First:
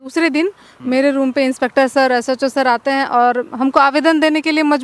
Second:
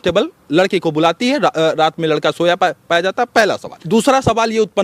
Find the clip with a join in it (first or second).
second